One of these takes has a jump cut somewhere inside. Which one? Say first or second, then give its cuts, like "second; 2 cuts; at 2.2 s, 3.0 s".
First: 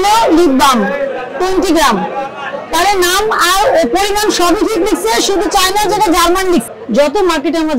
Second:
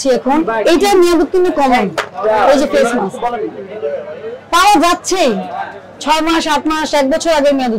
first; 1 cut; at 6.7 s